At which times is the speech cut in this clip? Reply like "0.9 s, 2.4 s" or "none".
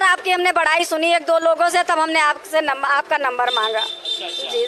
none

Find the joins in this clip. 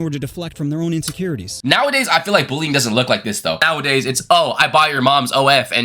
1.5 s, 3.6 s

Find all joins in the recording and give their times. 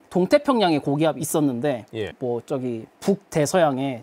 none

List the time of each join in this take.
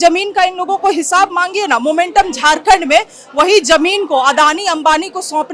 none

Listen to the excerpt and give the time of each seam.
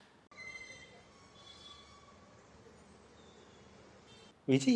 none

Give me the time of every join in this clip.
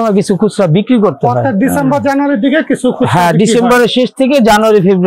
none

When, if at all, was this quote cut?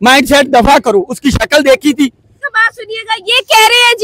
2.4 s

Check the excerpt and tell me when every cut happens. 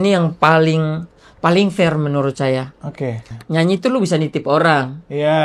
3.3 s

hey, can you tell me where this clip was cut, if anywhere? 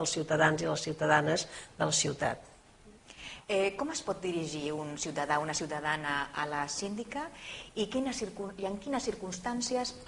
4.1 s

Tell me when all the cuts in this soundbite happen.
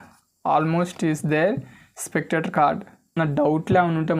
3.2 s

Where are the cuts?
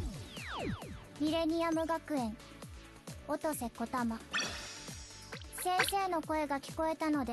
0.9 s

